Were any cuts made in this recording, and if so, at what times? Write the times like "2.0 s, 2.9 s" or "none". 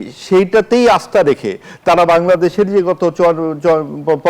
none